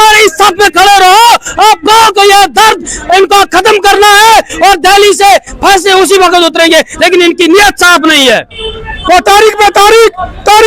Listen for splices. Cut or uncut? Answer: cut